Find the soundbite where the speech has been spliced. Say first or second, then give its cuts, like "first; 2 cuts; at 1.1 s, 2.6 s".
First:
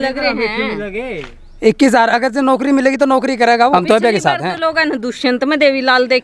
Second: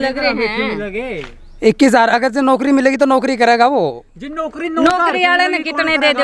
first; 1 cut; at 3.7 s